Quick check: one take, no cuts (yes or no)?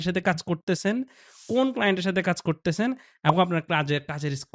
yes